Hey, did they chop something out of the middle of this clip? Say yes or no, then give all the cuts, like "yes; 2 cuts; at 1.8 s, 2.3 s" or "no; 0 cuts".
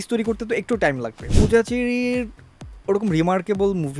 yes; 1 cut; at 1.3 s